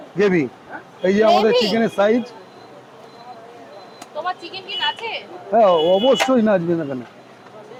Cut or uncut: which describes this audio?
uncut